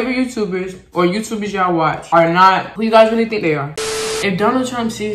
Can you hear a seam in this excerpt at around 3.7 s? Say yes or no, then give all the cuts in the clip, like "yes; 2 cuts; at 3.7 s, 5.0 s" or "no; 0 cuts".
yes; 1 cut; at 3.7 s